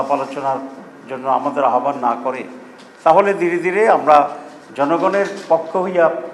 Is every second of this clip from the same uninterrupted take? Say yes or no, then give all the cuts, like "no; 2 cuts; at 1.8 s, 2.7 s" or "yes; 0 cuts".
yes; 0 cuts